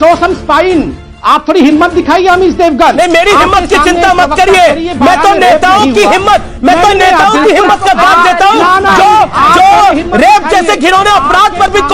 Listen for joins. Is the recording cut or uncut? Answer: cut